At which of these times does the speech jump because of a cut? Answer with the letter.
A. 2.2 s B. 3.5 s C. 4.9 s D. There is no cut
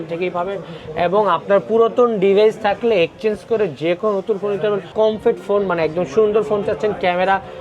C